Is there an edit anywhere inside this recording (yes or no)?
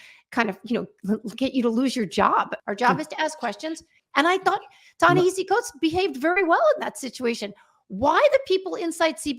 yes